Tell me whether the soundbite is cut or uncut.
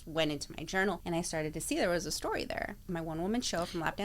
cut